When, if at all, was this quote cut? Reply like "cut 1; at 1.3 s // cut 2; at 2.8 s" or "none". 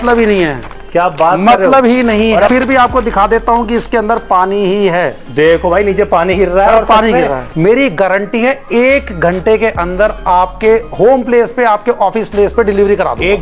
cut 1; at 2.5 s // cut 2; at 7.5 s